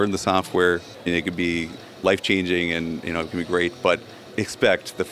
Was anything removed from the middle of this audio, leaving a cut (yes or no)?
yes